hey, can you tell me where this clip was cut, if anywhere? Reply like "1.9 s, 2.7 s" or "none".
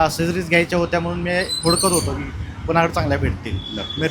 none

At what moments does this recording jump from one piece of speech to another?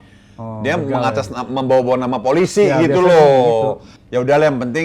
3.9 s

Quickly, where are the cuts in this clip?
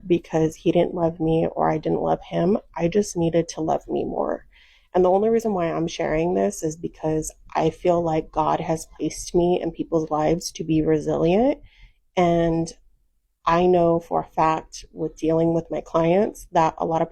3.1 s

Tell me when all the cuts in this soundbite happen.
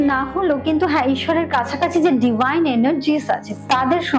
none

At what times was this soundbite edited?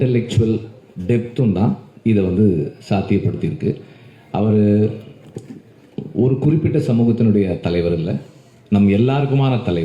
none

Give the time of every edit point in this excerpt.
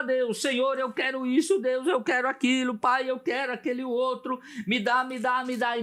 none

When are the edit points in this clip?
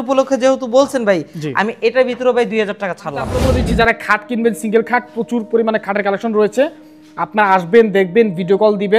3.3 s

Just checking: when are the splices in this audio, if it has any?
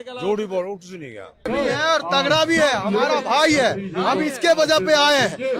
1.4 s

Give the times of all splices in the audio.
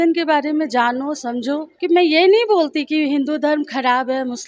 1.7 s

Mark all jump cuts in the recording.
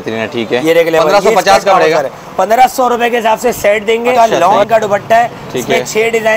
4.2 s

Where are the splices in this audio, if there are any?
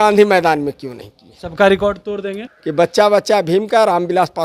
2.5 s

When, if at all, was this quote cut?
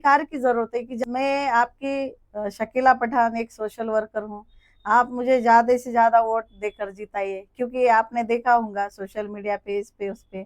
1.0 s

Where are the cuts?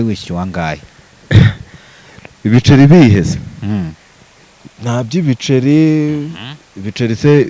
none

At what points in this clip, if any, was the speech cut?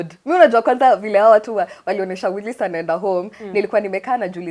none

